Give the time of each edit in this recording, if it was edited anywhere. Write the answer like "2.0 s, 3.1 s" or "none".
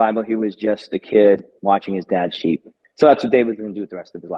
2.8 s